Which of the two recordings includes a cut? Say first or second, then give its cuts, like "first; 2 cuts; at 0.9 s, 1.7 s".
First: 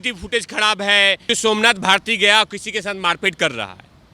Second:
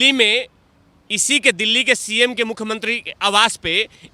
first; 1 cut; at 1.2 s